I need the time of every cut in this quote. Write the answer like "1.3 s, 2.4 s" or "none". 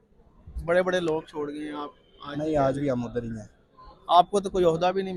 none

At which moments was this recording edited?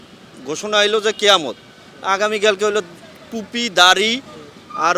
none

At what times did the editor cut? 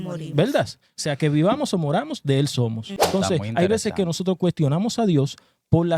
2.9 s

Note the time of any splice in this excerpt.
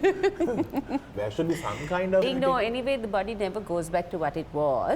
1.1 s, 2.3 s

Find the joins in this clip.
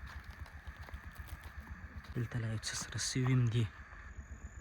2.0 s

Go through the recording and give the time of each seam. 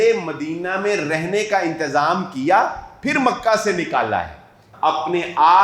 4.7 s

